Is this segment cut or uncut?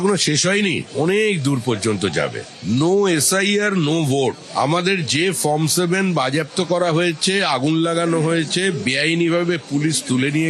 uncut